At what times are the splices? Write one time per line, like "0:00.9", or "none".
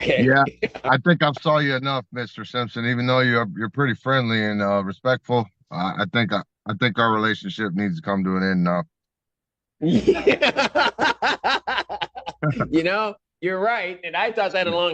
none